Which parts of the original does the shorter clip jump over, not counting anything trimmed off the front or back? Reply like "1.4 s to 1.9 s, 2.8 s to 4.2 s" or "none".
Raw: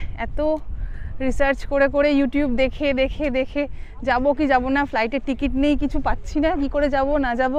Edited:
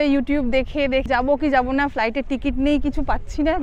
3.1 s to 4.0 s